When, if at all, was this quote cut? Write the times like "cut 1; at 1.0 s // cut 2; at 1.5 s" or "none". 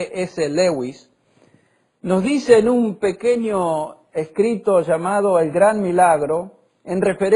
cut 1; at 3.4 s

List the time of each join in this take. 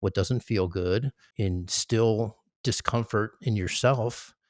cut 1; at 1.3 s

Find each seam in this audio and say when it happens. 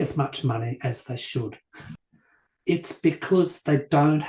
cut 1; at 1.7 s

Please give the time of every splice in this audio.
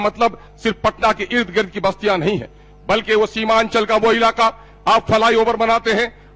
none

